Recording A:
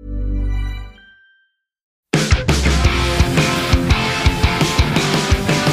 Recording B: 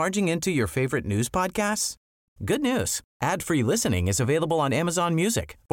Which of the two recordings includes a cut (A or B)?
A